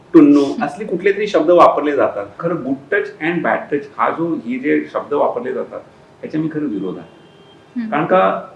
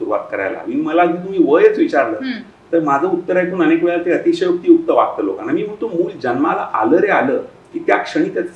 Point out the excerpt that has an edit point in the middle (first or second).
first